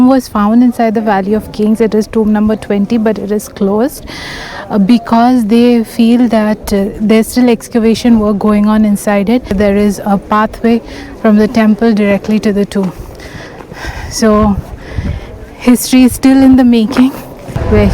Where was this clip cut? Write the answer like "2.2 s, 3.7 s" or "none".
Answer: 9.5 s